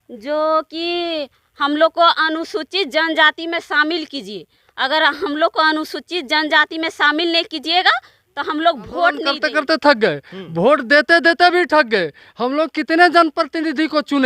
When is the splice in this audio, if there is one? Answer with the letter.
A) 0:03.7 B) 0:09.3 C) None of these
B